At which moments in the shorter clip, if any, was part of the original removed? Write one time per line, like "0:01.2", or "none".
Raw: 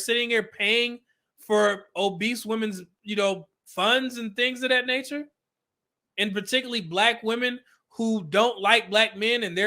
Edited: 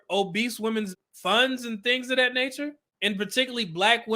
0:01.0
0:02.9